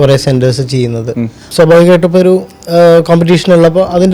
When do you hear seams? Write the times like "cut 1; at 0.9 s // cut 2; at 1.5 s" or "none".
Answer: cut 1; at 1.5 s